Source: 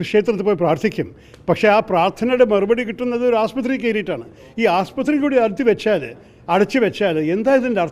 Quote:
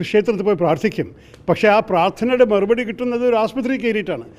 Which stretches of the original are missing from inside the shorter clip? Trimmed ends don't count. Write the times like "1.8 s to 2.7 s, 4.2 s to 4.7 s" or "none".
none